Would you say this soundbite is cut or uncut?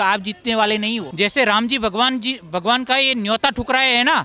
cut